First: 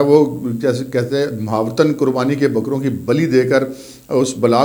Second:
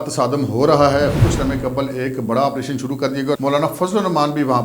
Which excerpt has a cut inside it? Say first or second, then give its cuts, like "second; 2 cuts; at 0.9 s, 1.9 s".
second; 2 cuts; at 1.2 s, 3.4 s